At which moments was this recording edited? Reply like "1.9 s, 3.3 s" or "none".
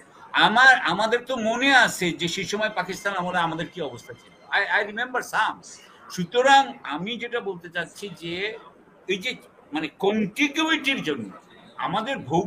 none